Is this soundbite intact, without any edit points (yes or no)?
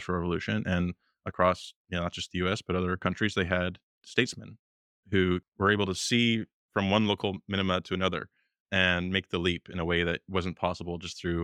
no